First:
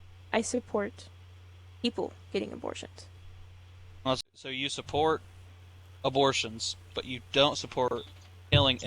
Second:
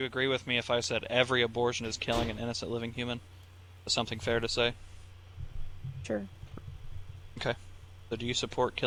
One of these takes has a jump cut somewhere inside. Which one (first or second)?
first